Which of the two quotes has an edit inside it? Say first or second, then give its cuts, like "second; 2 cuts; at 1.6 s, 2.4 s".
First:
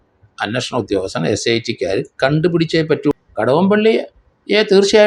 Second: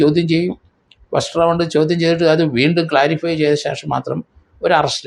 first; 1 cut; at 3.1 s